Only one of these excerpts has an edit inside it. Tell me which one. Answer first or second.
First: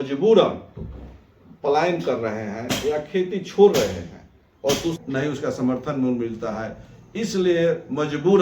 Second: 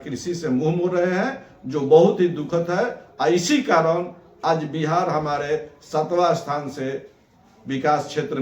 first